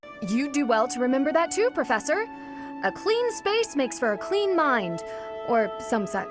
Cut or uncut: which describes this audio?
uncut